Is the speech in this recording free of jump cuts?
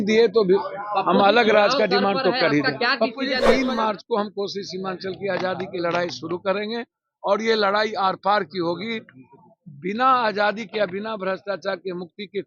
no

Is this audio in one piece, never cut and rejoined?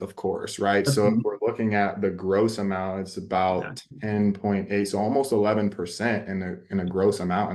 yes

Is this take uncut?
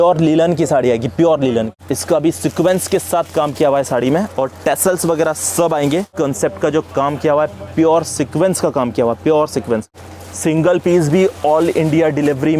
no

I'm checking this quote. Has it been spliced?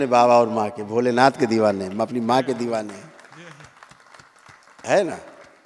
no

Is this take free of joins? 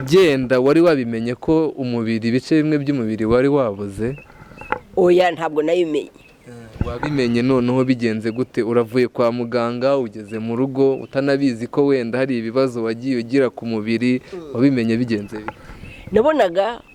yes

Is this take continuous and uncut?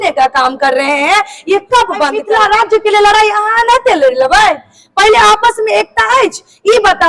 no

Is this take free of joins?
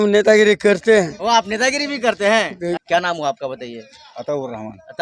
yes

